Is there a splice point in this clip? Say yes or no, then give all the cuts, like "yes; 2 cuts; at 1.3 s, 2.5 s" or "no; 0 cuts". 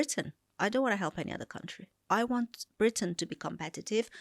yes; 1 cut; at 1.9 s